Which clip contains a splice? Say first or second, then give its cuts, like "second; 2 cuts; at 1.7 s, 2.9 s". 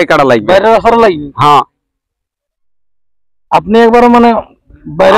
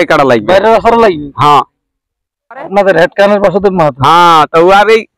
second; 1 cut; at 2.7 s